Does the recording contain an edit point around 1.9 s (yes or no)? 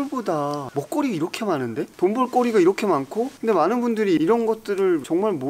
yes